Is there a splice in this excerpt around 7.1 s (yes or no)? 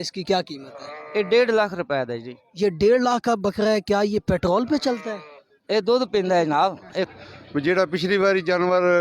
yes